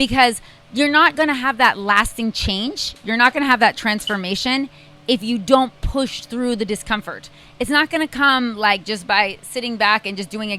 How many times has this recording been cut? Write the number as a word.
zero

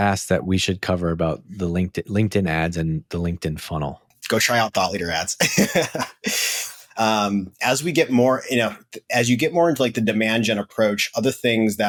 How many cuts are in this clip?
zero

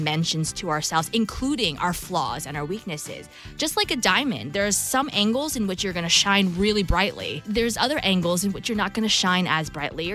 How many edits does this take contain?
one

